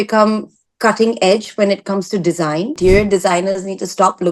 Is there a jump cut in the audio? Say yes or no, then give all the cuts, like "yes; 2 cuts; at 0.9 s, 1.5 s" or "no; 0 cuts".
yes; 1 cut; at 2.8 s